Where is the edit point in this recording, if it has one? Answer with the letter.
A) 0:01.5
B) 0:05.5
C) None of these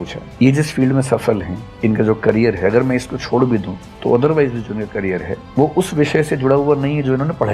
C